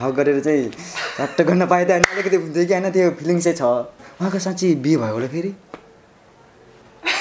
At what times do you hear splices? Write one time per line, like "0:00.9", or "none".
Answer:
0:04.0